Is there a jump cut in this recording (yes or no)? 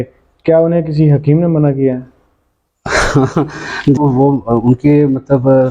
yes